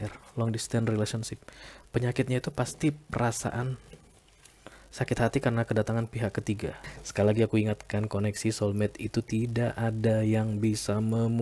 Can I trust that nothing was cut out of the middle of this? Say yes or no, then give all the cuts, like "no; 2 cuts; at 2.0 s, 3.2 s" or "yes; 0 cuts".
no; 1 cut; at 6.9 s